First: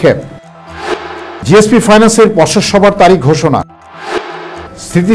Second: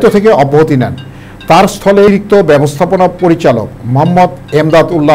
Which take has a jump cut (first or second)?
second